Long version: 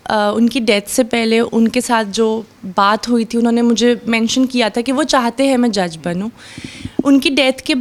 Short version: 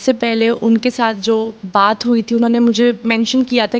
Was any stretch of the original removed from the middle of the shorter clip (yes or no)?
yes